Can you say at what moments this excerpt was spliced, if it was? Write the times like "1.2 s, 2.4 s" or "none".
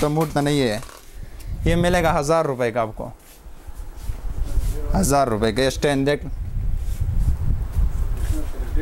none